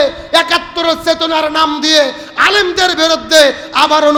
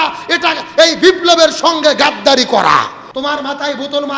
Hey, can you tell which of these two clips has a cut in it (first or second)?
second